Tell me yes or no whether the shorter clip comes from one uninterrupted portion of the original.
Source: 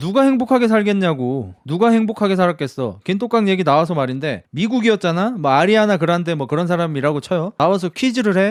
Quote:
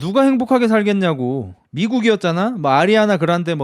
no